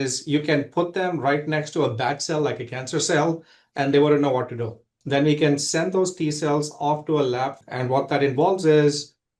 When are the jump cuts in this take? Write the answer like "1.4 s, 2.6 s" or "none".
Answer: 5.0 s, 7.6 s

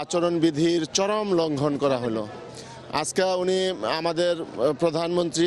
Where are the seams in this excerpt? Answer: 4.1 s

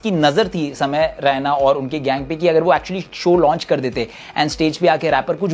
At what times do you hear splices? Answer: none

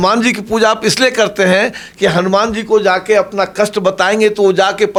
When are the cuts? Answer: none

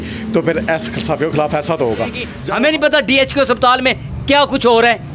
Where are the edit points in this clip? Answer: 2.6 s

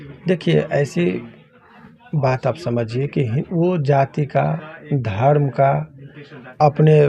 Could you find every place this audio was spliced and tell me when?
none

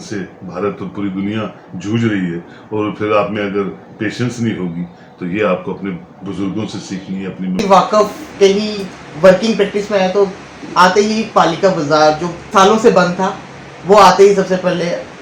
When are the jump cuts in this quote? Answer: 7.6 s

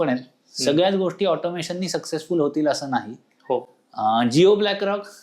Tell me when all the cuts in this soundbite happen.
none

